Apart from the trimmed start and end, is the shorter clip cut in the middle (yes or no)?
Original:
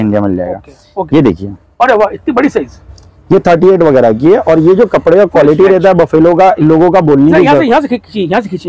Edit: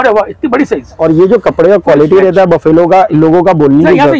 yes